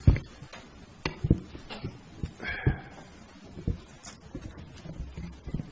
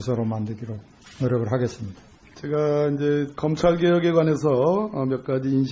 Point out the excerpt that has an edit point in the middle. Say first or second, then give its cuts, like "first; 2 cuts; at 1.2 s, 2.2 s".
second; 1 cut; at 3.9 s